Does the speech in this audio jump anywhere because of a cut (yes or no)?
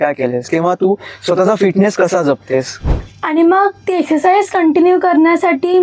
yes